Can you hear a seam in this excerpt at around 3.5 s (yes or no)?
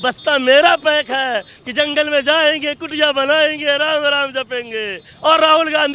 no